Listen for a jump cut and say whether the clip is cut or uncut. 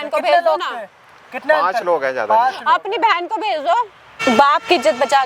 cut